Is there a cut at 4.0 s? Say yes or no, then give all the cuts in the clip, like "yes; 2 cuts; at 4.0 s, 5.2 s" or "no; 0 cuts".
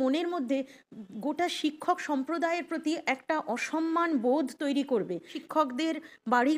no; 1 cut; at 5.4 s